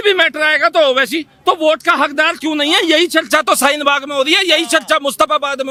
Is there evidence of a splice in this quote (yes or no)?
no